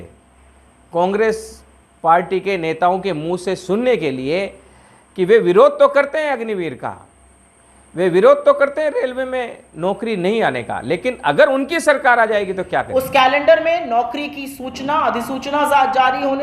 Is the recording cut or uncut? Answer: cut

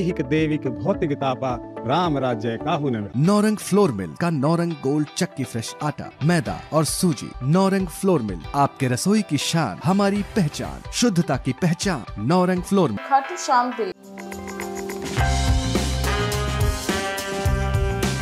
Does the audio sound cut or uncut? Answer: cut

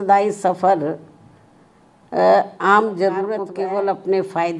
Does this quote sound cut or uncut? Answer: cut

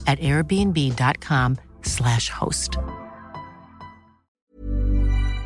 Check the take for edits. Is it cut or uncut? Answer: cut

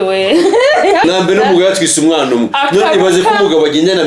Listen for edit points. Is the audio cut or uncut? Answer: cut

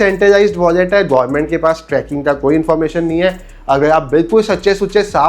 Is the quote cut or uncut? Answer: uncut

